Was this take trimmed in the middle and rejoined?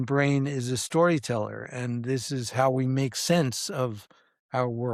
no; 0 cuts

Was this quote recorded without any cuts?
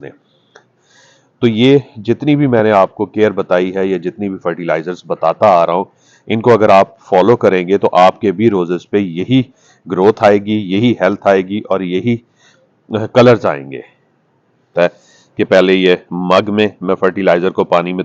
no; 1 cut; at 14.7 s

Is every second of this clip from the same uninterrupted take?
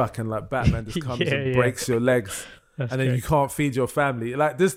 yes; 0 cuts

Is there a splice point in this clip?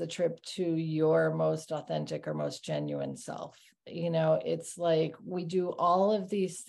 no; 0 cuts

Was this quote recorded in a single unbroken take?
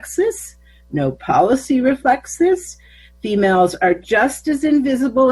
yes; 0 cuts

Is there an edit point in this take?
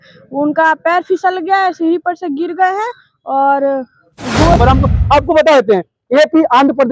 yes; 1 cut; at 4.5 s

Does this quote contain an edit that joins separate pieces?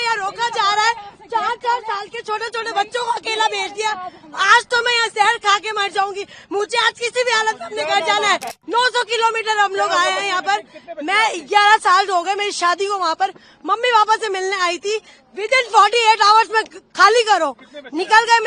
yes; 1 cut; at 8.6 s

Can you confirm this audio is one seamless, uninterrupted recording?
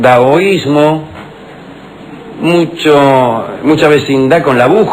no; 1 cut; at 1.8 s

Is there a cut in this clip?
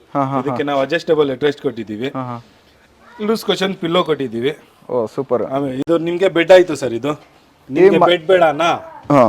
no; 0 cuts

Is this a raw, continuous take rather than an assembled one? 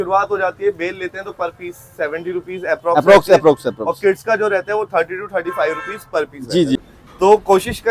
no; 1 cut; at 6.8 s

